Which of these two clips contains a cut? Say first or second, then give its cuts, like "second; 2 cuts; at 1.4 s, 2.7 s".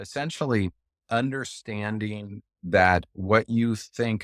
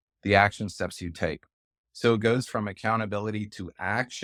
first; 1 cut; at 1.0 s